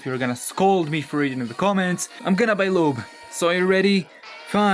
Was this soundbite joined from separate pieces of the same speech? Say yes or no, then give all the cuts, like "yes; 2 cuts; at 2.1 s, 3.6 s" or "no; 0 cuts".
yes; 1 cut; at 2.1 s